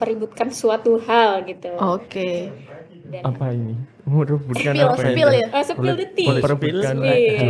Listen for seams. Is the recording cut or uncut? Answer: uncut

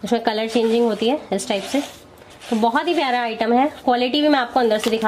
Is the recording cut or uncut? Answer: uncut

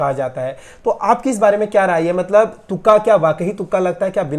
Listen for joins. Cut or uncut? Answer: uncut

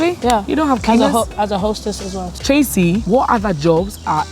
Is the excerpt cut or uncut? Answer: cut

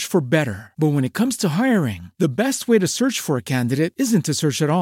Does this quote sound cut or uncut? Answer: uncut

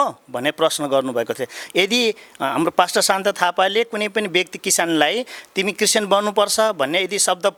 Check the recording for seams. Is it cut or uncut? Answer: uncut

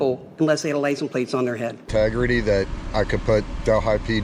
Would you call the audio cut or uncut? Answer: cut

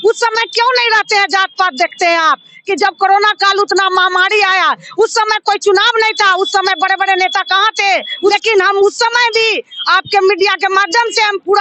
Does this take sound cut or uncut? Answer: cut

